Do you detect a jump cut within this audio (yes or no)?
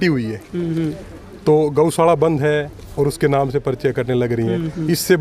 no